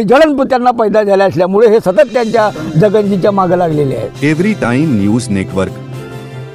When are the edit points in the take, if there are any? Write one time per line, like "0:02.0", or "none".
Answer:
0:04.1